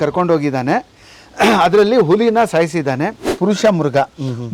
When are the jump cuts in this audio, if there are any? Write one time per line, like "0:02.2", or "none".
0:03.2